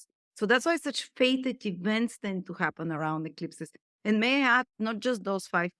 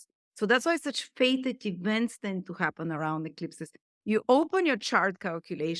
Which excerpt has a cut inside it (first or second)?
second